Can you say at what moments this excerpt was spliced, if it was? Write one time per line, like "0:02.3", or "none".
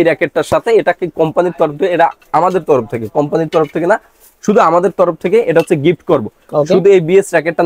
none

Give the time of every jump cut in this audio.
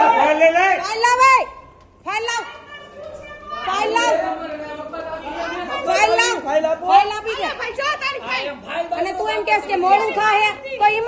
none

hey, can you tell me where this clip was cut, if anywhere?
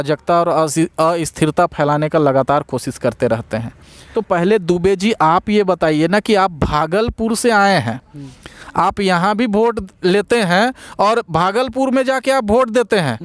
0:03.9

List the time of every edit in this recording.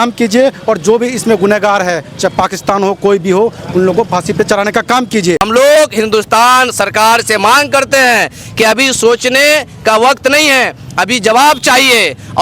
0:05.4

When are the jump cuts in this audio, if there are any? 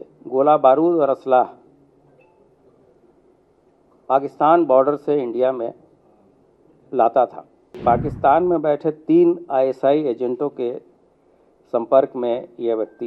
0:07.8

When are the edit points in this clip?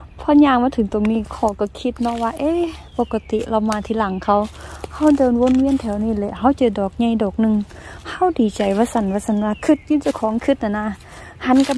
none

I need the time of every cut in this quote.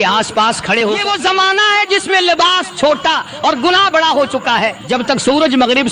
0:01.0
0:04.8

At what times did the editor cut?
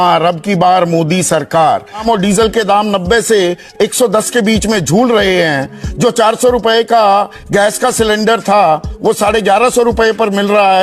0:02.0

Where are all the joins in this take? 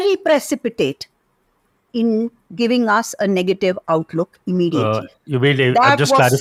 none

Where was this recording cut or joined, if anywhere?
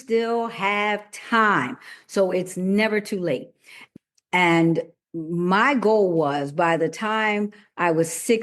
0:03.8

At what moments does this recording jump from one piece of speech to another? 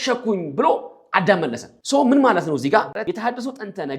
0:01.7
0:03.0

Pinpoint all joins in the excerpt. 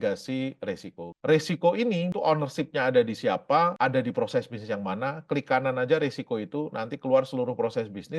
0:02.1
0:03.7

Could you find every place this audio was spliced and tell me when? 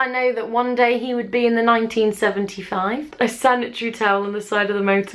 0:03.1

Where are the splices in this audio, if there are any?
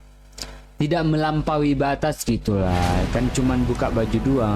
none

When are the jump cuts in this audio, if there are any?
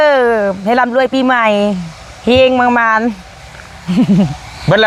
none

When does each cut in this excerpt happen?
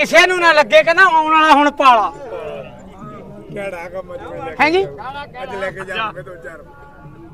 none

